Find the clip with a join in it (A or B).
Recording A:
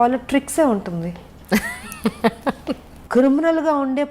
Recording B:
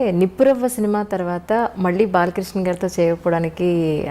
A